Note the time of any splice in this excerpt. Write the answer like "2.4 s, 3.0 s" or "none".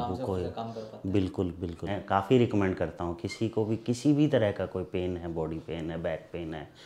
1.9 s